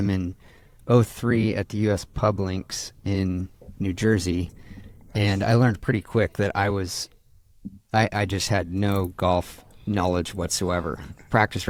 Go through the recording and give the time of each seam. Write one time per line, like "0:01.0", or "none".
none